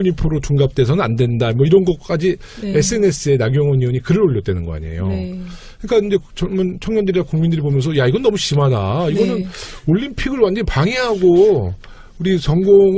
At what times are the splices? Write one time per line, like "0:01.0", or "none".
0:10.4